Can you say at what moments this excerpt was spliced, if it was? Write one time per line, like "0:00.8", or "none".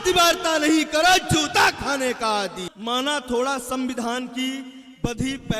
0:02.6